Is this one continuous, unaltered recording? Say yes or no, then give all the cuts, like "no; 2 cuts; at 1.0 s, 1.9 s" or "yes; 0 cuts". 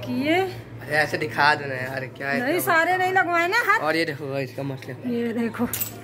yes; 0 cuts